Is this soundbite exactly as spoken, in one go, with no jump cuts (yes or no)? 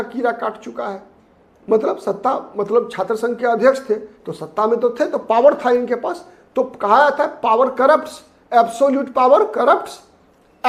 yes